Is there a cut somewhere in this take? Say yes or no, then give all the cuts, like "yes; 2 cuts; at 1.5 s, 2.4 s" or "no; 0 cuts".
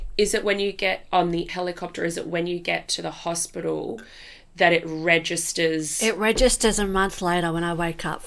yes; 1 cut; at 1.5 s